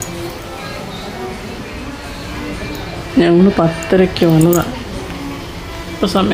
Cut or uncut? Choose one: uncut